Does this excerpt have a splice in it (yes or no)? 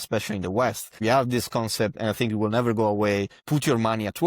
yes